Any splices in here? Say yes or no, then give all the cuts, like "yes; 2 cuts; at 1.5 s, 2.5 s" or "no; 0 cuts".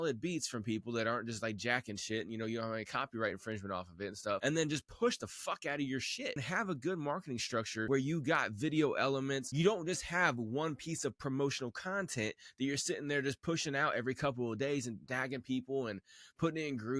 yes; 4 cuts; at 4.4 s, 6.4 s, 7.9 s, 9.5 s